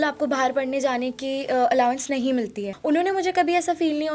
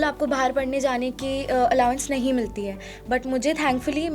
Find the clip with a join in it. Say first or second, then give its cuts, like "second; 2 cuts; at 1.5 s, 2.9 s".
first; 1 cut; at 2.7 s